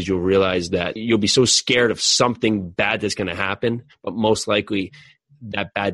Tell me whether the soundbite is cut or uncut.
uncut